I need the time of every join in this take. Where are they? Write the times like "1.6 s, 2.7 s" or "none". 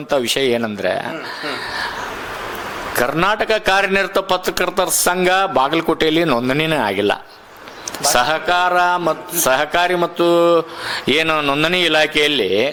none